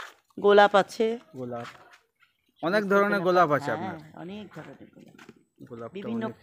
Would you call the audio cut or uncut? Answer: uncut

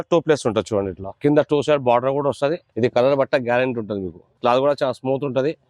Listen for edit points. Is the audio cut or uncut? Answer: cut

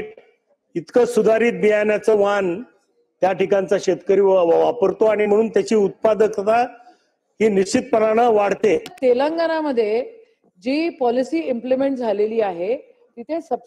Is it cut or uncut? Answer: cut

